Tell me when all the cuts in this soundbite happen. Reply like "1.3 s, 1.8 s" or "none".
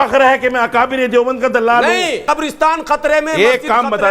2.2 s